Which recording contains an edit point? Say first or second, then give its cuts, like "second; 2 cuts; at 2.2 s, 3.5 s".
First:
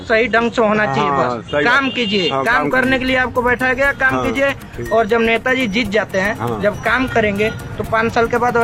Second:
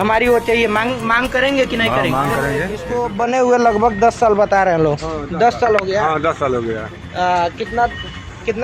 second; 1 cut; at 2.9 s